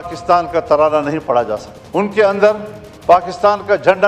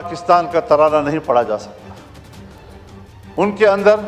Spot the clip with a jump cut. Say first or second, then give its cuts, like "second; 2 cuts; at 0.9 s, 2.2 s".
first; 1 cut; at 1.7 s